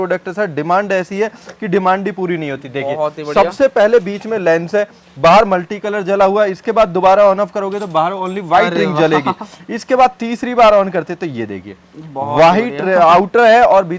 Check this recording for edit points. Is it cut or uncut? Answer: uncut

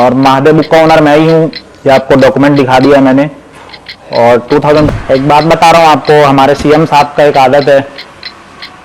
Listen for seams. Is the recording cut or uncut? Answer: cut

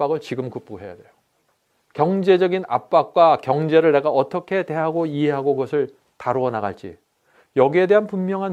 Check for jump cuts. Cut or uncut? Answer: uncut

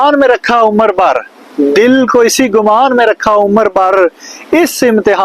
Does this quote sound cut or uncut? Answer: uncut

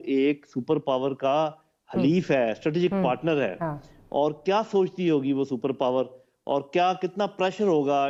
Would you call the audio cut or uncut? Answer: uncut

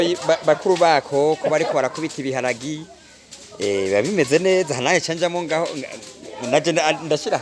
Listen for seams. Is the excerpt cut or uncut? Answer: uncut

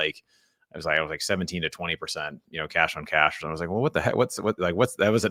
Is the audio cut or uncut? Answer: uncut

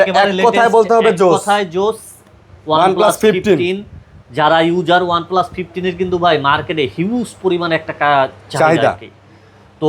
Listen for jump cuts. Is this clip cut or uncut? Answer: uncut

